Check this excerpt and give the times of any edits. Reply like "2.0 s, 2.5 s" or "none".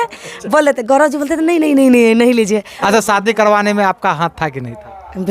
2.8 s